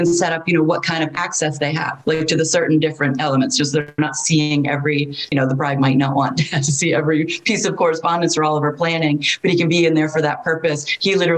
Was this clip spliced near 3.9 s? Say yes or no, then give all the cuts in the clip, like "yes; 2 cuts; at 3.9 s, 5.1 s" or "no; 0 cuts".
no; 1 cut; at 5.3 s